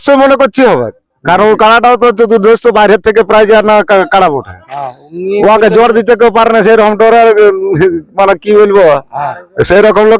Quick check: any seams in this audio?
no; 0 cuts

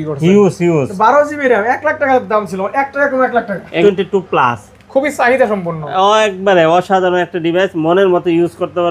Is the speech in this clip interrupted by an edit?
yes; 1 cut; at 3.8 s

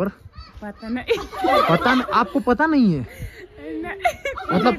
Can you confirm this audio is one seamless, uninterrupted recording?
yes; 0 cuts

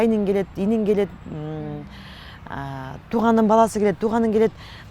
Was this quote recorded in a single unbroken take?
yes; 0 cuts

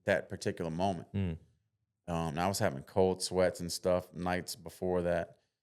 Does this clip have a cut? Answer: no; 0 cuts

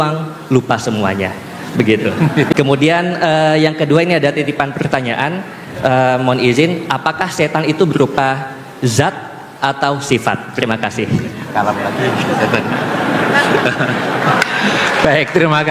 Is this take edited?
yes; 1 cut; at 2.5 s

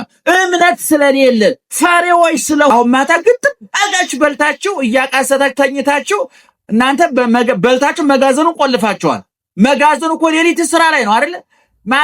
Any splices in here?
yes; 1 cut; at 2.7 s

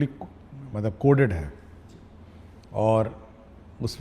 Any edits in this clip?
no; 0 cuts

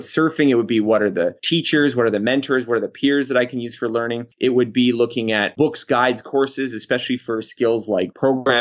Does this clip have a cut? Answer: yes; 2 cuts; at 4.2 s, 5.5 s

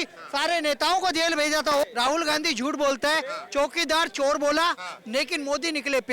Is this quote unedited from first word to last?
no; 1 cut; at 1.8 s

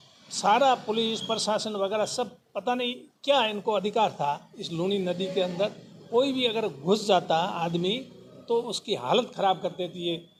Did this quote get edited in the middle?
no; 0 cuts

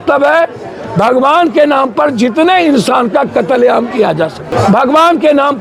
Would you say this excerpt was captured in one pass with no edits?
no; 1 cut; at 4.4 s

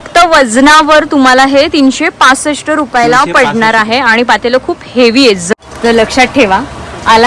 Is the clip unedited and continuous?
no; 1 cut; at 5.5 s

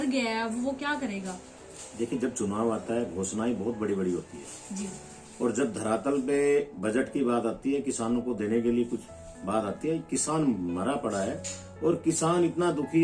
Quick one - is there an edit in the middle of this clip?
no; 0 cuts

